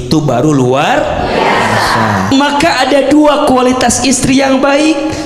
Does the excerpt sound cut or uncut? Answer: cut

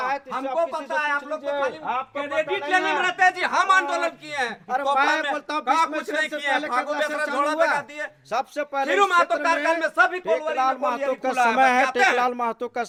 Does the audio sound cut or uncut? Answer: uncut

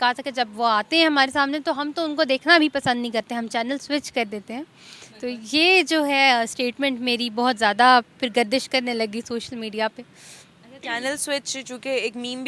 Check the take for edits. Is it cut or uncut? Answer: uncut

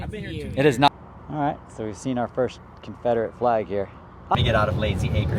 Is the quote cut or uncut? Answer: cut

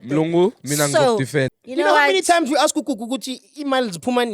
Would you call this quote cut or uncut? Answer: cut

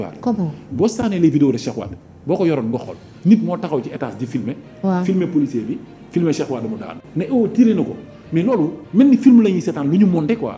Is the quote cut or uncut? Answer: uncut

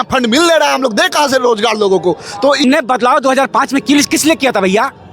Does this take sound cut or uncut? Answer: cut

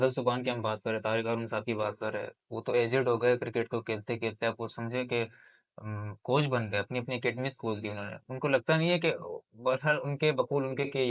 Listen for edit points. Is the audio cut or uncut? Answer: uncut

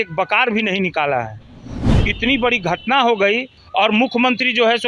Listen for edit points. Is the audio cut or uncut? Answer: cut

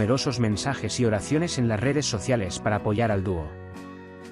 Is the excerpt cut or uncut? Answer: uncut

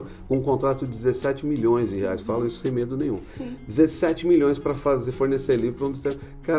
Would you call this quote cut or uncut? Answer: uncut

